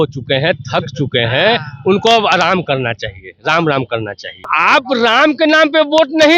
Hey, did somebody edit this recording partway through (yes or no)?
yes